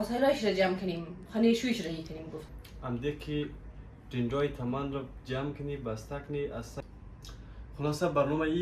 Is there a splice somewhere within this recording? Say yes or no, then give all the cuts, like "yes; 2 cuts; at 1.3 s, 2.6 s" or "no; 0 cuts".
yes; 2 cuts; at 2.4 s, 6.7 s